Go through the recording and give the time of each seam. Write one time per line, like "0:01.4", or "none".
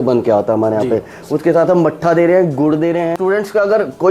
0:03.2